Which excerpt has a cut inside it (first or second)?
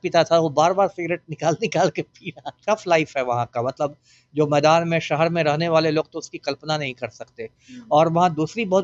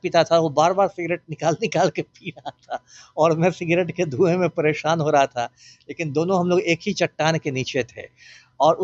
first